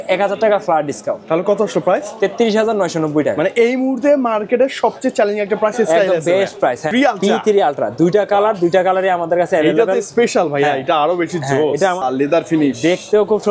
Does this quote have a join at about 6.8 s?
yes; 2 cuts; at 6.8 s, 12.0 s

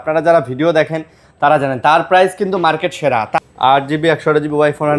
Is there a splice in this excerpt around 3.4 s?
yes; 1 cut; at 3.4 s

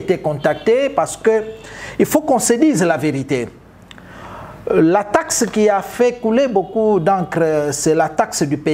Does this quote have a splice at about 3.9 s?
no; 0 cuts

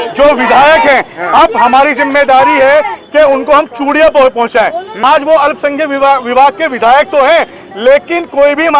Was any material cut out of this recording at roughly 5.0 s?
yes; 1 cut; at 5.0 s

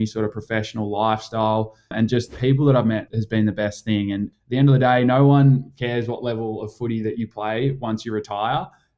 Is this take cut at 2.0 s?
yes; 3 cuts; at 2.0 s, 3.1 s, 4.3 s

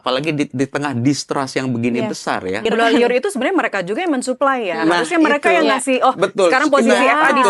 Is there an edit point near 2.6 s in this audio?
yes; 1 cut; at 2.6 s

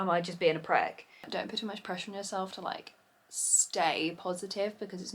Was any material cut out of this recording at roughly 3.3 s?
no; 1 cut; at 1.3 s

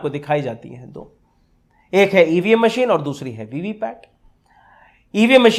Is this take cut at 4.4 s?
no; 0 cuts

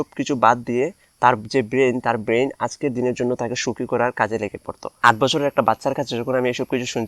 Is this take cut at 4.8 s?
yes; 1 cut; at 4.8 s

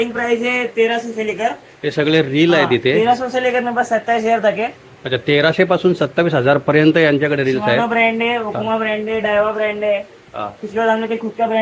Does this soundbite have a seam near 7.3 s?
no; 0 cuts

